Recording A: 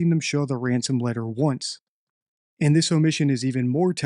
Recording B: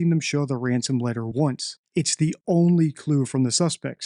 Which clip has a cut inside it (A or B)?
B